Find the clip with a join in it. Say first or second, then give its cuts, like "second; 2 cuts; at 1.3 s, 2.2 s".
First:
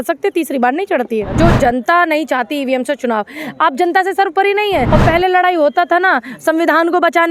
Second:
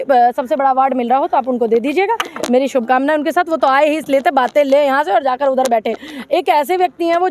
first; 2 cuts; at 1.3 s, 4.9 s